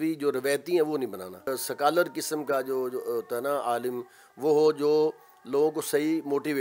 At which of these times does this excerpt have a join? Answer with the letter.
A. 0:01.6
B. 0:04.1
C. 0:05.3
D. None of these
A